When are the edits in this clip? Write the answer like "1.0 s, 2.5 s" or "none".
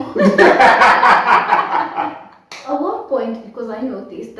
2.7 s